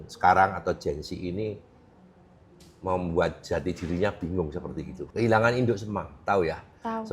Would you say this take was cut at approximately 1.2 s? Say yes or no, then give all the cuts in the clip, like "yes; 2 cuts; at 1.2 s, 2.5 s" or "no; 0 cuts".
no; 1 cut; at 5.0 s